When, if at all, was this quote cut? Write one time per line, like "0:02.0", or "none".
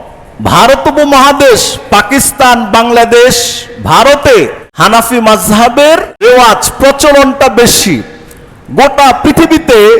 0:04.6
0:06.2